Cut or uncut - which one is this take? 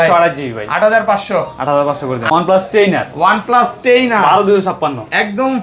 cut